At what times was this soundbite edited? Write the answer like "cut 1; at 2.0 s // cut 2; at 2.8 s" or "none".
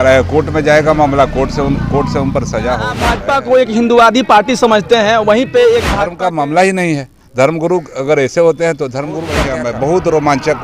cut 1; at 3.1 s // cut 2; at 6.0 s // cut 3; at 9.4 s